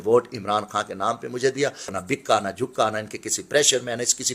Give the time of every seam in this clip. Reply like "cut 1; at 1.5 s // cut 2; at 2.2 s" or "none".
cut 1; at 1.9 s